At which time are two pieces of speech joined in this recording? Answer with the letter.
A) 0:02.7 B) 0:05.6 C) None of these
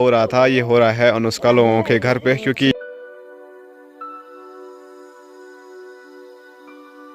A